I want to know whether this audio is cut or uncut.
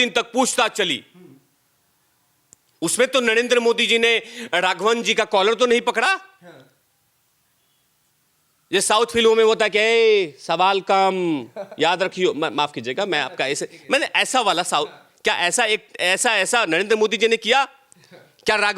uncut